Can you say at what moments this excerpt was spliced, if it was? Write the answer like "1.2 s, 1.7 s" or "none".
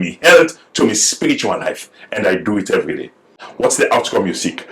3.4 s